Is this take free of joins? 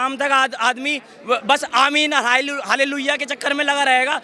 yes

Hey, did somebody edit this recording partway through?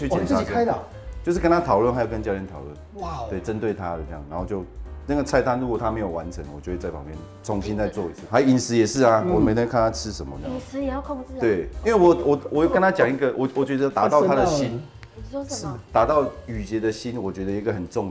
yes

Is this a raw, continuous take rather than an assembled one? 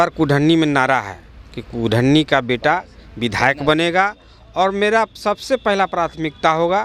yes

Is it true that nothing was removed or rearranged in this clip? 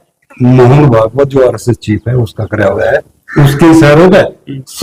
yes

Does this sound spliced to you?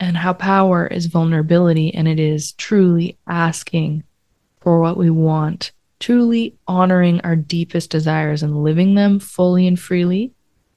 no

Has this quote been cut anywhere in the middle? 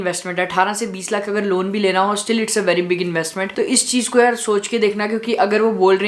no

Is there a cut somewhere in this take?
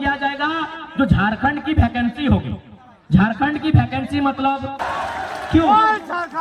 yes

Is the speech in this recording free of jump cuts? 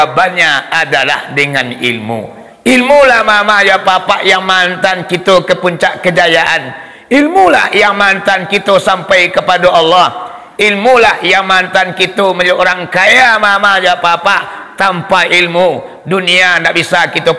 yes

